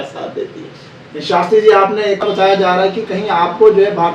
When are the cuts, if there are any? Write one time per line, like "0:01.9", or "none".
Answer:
0:02.2